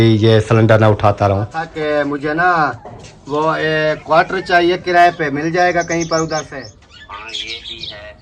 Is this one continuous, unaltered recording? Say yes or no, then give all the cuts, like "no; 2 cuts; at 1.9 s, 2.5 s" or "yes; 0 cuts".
no; 2 cuts; at 1.6 s, 6.5 s